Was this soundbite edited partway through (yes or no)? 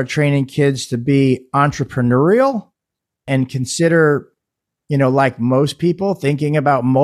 yes